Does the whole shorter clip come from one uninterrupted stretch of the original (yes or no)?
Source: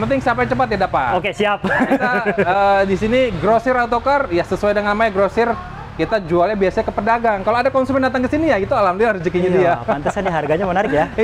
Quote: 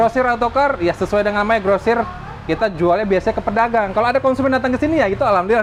yes